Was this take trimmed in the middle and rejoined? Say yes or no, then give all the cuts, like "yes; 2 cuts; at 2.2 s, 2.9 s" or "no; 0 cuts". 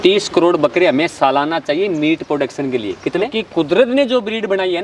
yes; 1 cut; at 3.3 s